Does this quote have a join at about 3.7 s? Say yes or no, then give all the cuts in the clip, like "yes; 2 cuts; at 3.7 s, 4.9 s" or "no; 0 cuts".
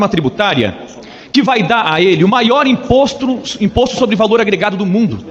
no; 0 cuts